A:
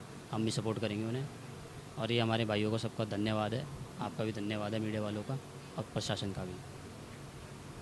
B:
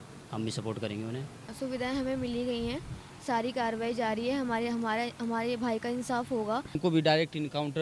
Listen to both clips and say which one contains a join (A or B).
B